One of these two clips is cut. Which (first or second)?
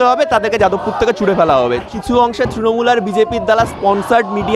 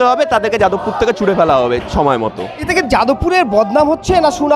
first